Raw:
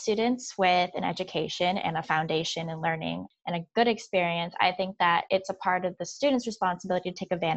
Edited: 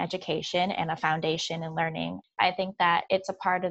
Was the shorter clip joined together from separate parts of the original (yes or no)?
yes